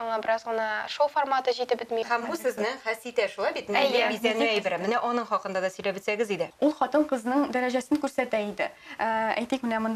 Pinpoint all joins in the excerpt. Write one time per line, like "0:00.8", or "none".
0:02.0
0:06.5